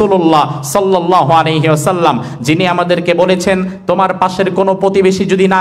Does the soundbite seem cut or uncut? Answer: uncut